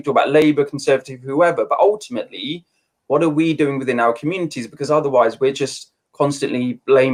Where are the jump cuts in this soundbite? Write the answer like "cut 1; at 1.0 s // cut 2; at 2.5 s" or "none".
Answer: none